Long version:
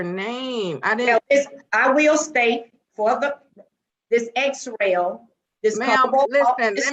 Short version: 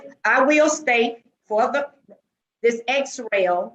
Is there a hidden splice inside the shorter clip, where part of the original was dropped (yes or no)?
no